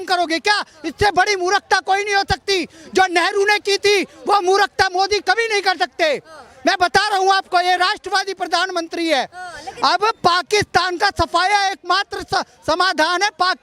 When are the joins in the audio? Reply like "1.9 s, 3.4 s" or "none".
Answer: none